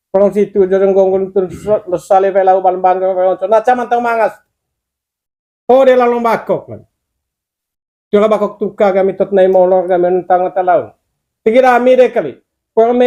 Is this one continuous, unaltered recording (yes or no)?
yes